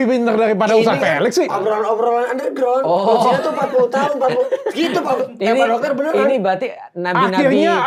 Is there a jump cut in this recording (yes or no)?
no